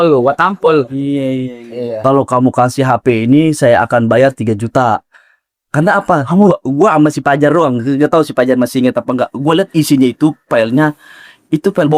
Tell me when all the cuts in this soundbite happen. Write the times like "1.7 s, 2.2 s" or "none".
2.0 s